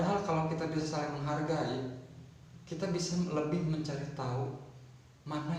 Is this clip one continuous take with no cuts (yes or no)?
yes